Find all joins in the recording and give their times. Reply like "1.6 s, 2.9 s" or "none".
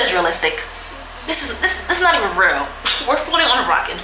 none